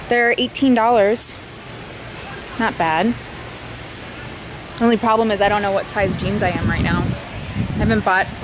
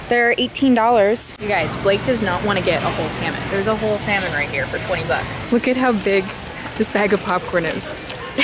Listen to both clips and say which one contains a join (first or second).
second